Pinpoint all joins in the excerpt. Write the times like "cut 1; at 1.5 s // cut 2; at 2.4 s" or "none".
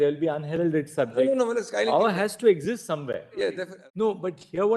cut 1; at 3.7 s